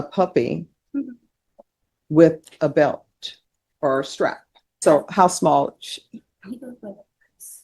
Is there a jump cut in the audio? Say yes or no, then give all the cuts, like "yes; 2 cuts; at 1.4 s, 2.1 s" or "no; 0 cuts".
yes; 1 cut; at 4.8 s